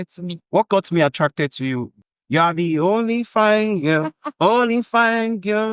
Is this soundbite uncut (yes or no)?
no